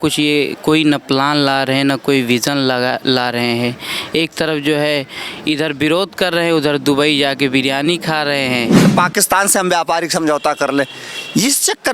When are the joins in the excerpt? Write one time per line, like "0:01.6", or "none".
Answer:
0:08.9